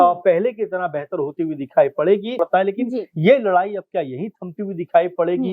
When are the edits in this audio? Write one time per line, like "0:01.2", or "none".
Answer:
0:02.4